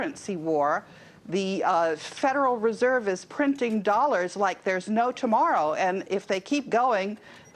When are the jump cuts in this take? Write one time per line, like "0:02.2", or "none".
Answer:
0:01.3